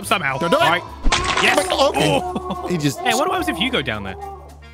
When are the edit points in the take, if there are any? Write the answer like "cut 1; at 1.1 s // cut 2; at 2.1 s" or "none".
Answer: none